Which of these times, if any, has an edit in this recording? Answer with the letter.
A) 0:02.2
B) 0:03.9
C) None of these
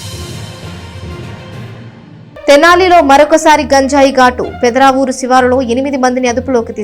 A